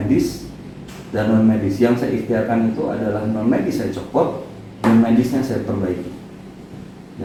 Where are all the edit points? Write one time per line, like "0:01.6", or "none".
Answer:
none

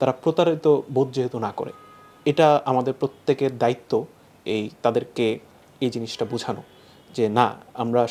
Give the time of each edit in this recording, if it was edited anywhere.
none

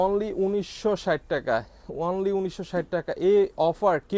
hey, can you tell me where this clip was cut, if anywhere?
none

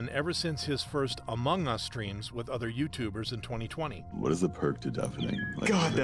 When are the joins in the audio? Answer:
none

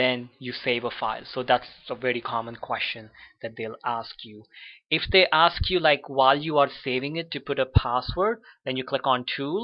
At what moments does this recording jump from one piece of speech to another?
0:03.9

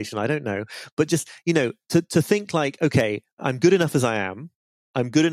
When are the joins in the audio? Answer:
0:03.4

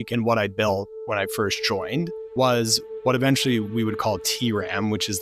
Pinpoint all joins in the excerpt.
0:02.2

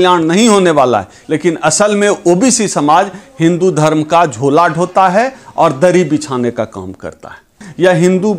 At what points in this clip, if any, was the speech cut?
0:01.1
0:07.6

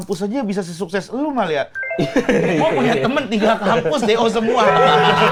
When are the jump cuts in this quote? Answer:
none

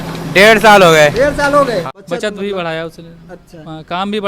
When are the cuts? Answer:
0:01.9

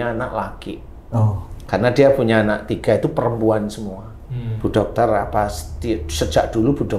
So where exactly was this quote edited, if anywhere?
0:04.1

